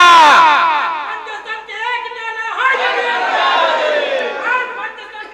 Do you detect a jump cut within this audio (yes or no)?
no